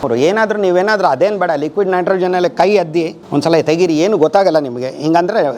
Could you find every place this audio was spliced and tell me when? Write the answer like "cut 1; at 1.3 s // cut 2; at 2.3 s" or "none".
cut 1; at 3.2 s